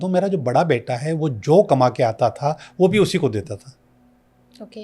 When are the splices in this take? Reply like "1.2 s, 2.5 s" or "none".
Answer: none